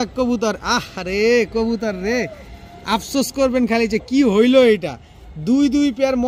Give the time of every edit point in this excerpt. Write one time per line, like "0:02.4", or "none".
none